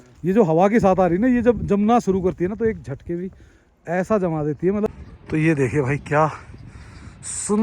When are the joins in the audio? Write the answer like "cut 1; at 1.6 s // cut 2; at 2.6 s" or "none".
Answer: cut 1; at 4.9 s